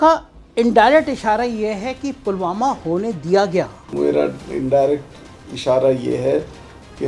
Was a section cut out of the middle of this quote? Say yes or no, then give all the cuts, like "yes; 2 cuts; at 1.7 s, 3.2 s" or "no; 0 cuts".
yes; 1 cut; at 3.9 s